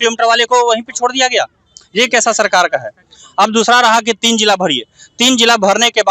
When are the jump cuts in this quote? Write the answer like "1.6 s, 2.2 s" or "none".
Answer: none